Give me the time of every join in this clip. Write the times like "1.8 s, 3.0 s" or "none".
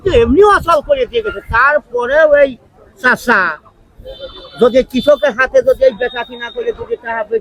none